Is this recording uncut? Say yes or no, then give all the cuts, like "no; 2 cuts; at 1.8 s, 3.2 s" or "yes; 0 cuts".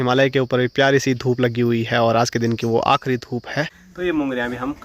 no; 1 cut; at 3.8 s